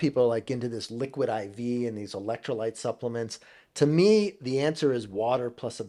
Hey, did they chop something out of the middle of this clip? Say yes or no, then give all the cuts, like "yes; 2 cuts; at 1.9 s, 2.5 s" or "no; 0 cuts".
no; 0 cuts